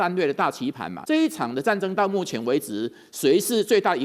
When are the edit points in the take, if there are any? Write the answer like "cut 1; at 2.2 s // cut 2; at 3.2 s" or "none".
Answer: cut 1; at 0.9 s

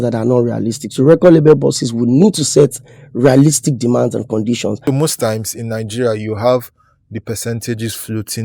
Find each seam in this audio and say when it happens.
cut 1; at 4.8 s

